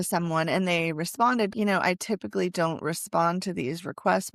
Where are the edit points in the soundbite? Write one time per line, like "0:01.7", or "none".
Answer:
0:01.5